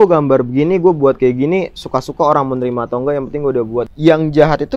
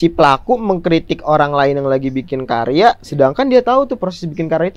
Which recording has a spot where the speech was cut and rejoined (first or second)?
first